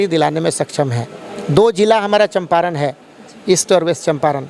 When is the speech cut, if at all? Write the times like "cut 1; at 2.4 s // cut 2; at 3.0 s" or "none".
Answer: none